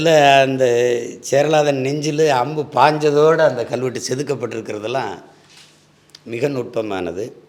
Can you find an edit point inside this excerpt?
no; 0 cuts

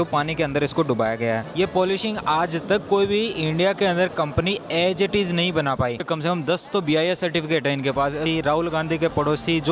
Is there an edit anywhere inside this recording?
yes; 3 cuts; at 1.5 s, 6.0 s, 8.3 s

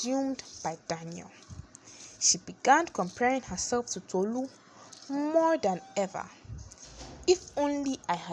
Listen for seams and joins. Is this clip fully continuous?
yes; 0 cuts

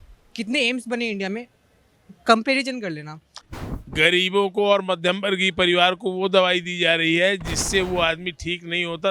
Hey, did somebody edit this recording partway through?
yes; 1 cut; at 3.4 s

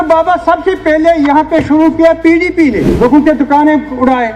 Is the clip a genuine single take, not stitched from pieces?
no; 1 cut; at 2.9 s

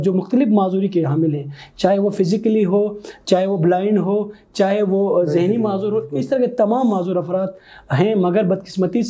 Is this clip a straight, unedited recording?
yes; 0 cuts

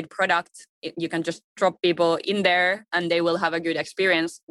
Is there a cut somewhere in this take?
yes; 1 cut; at 2.2 s

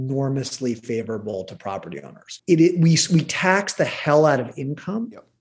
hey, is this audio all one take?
no; 1 cut; at 2.3 s

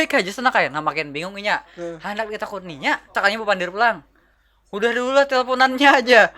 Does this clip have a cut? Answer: yes; 1 cut; at 3.1 s

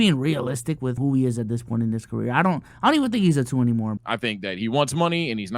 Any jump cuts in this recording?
yes; 2 cuts; at 1.0 s, 4.0 s

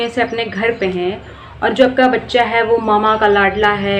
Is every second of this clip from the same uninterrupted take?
yes; 0 cuts

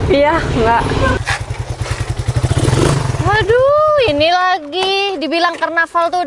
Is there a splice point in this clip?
yes; 1 cut; at 1.2 s

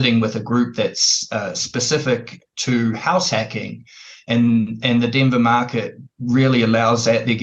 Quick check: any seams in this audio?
no; 0 cuts

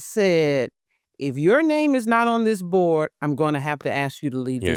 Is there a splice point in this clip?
no; 0 cuts

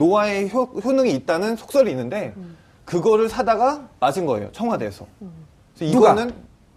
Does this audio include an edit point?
no; 0 cuts

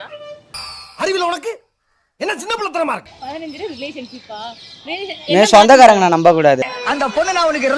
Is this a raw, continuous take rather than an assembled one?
no; 1 cut; at 3.1 s

